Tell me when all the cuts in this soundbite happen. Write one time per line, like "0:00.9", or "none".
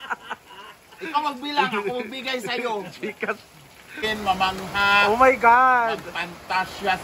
0:04.0